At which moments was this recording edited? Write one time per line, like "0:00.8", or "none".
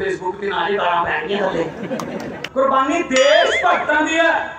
0:02.4